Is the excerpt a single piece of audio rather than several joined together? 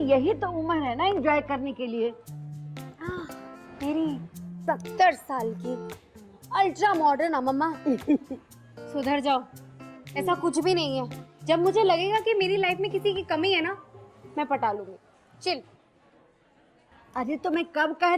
yes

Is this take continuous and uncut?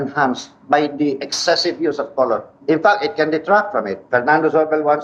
yes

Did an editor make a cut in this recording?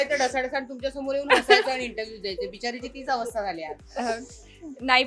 no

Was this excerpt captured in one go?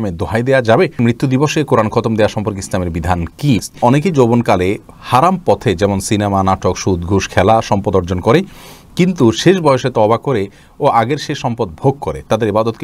no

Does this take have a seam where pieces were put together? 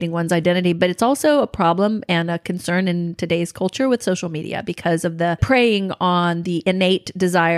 yes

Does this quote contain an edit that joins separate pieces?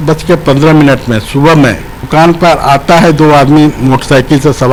no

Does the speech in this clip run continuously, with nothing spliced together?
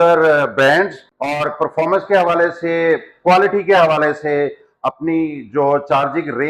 yes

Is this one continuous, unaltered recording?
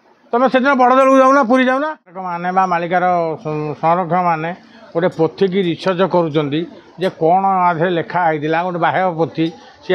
no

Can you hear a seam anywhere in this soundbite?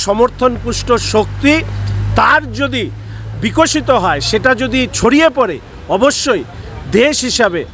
no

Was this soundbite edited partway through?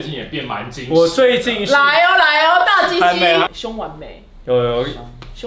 no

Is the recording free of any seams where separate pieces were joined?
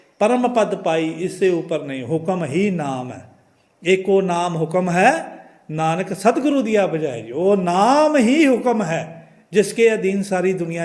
yes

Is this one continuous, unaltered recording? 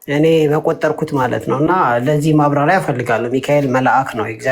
yes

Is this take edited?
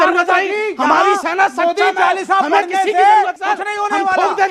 yes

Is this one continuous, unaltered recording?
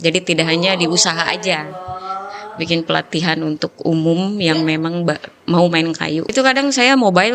no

